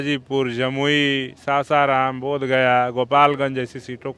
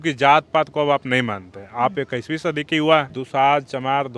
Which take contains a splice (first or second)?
second